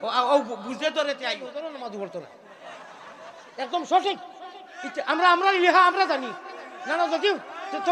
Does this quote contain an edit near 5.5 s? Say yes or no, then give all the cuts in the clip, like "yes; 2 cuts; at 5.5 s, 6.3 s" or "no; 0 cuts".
no; 1 cut; at 1.5 s